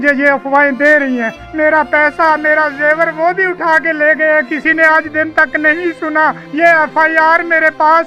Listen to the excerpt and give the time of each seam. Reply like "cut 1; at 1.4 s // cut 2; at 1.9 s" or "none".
cut 1; at 1.4 s // cut 2; at 6.4 s